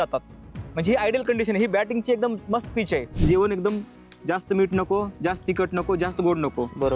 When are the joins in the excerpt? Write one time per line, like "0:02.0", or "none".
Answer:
0:03.2